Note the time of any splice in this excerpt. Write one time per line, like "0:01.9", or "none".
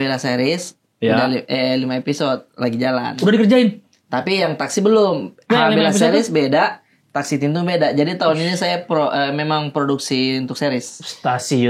none